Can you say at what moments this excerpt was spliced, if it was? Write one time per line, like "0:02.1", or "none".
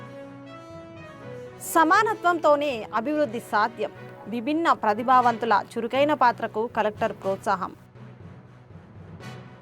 none